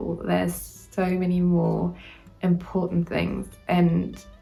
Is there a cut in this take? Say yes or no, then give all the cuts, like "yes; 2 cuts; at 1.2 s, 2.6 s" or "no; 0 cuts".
no; 0 cuts